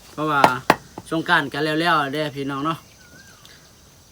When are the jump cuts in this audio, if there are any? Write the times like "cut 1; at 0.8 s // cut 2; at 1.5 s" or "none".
none